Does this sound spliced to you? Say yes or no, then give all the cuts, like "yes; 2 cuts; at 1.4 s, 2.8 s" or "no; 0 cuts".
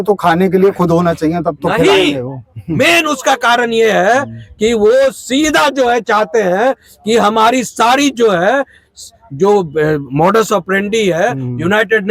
no; 0 cuts